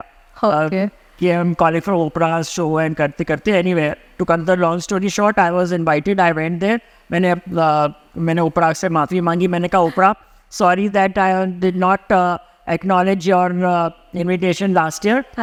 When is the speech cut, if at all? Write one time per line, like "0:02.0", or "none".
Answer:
none